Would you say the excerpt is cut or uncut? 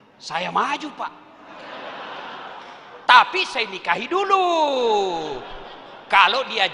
uncut